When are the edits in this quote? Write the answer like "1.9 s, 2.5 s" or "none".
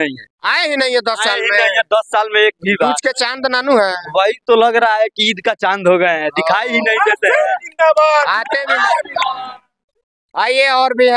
none